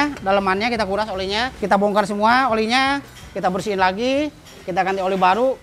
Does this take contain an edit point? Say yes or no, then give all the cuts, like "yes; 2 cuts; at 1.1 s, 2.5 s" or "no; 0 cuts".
yes; 1 cut; at 1.6 s